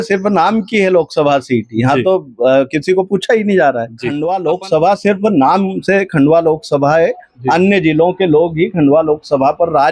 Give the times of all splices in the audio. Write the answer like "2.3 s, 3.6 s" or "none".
4.1 s